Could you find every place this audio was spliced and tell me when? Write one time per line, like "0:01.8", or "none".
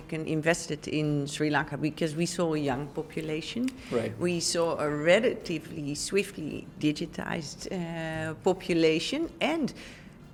none